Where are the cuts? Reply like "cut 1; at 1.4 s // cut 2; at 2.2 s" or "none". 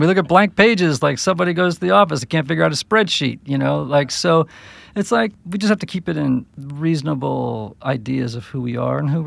cut 1; at 5.4 s // cut 2; at 6.6 s